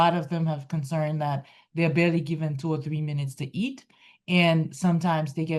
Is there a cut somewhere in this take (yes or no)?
no